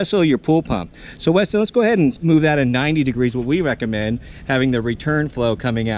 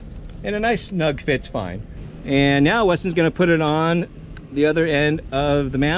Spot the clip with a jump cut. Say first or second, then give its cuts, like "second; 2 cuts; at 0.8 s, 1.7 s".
first; 1 cut; at 2.2 s